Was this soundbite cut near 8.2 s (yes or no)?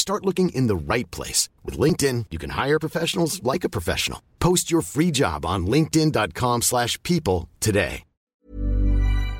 yes